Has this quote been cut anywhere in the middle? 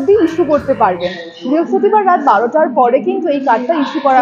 no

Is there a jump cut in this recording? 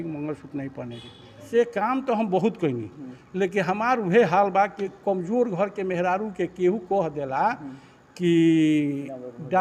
yes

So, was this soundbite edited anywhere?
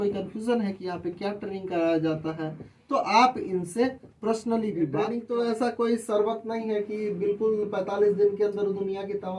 yes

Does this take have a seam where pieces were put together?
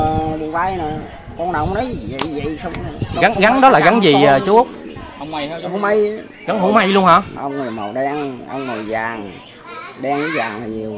yes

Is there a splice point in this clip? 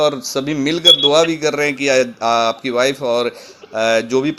no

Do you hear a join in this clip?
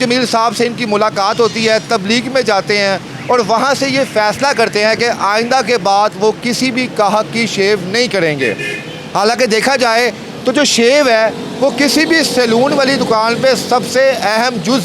no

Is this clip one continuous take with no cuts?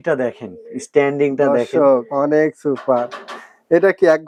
yes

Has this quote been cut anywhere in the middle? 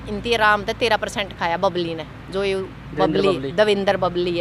no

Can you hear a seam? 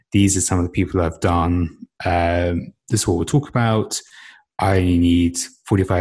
no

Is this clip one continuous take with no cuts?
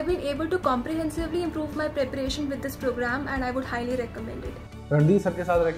yes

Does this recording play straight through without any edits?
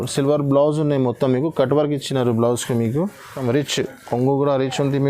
no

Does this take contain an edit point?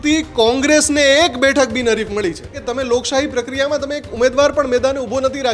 yes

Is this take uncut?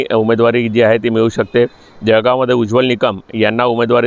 yes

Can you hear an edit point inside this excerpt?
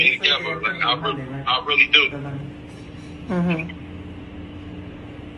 no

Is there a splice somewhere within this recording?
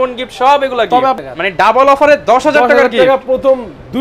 yes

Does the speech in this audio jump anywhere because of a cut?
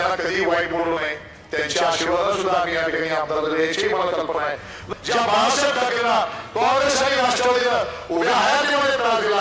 yes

